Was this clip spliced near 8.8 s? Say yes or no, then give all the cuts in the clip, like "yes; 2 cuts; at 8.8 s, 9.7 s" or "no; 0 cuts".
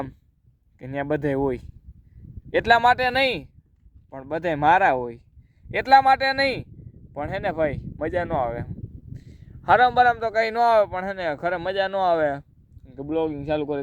no; 0 cuts